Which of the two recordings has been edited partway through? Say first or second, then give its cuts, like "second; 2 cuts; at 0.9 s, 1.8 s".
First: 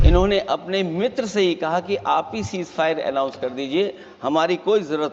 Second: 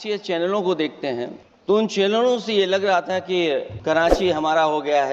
second; 2 cuts; at 1.4 s, 3.7 s